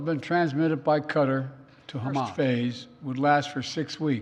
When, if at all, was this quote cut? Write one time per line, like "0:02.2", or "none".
0:02.3